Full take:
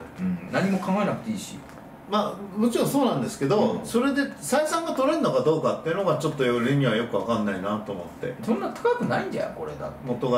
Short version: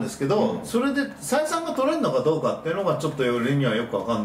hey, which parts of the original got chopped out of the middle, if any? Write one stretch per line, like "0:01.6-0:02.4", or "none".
none